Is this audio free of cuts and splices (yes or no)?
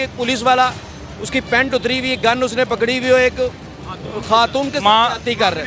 yes